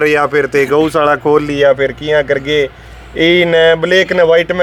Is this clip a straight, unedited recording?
yes; 0 cuts

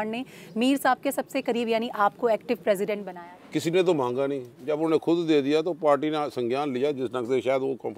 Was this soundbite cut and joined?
yes; 1 cut; at 3.1 s

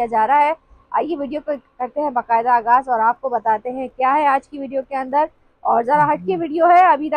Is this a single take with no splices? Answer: yes; 0 cuts

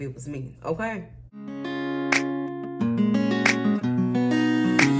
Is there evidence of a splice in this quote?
yes; 1 cut; at 1.6 s

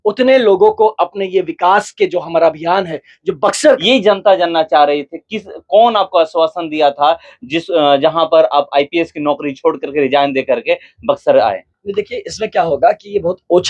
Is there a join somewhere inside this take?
yes; 1 cut; at 3.8 s

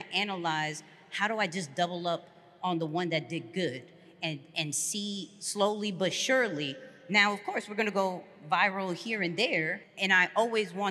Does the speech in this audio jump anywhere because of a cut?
yes; 1 cut; at 9.8 s

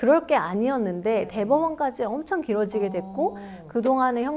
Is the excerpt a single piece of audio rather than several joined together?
yes; 0 cuts

